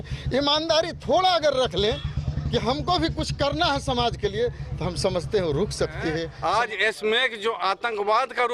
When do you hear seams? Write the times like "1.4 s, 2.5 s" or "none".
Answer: 6.3 s